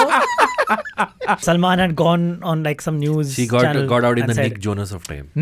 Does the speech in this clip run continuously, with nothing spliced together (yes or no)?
no